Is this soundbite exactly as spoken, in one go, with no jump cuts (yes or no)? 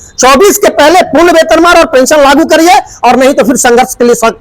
yes